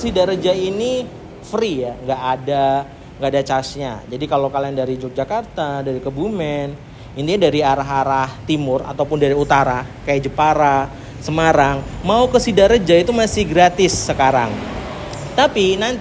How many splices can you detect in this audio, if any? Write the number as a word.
zero